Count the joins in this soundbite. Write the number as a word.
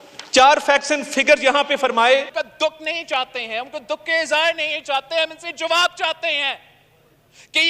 one